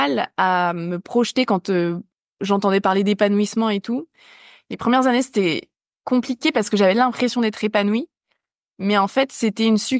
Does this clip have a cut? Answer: no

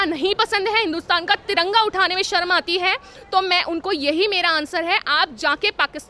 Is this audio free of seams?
yes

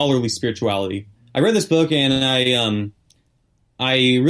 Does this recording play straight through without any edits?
no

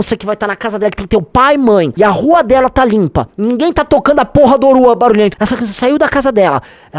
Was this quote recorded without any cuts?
no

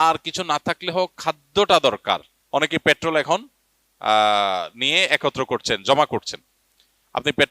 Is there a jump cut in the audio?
yes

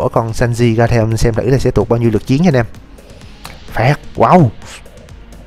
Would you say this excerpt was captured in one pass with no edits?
yes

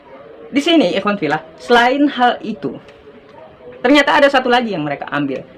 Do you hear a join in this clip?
no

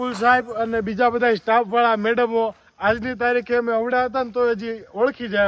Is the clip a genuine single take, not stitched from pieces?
yes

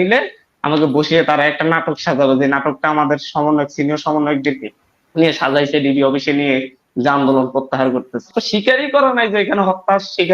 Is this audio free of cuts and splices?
no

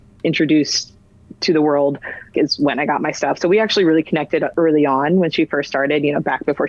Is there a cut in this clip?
yes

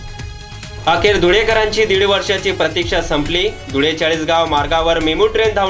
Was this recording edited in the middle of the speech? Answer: no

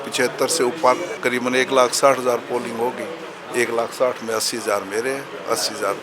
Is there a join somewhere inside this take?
yes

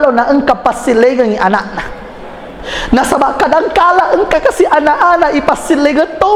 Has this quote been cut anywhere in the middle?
no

